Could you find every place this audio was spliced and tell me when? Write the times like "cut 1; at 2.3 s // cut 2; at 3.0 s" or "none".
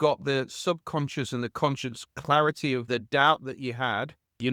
cut 1; at 2.9 s